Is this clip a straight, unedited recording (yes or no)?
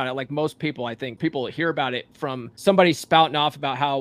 no